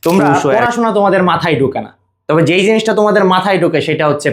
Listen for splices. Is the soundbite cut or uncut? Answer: uncut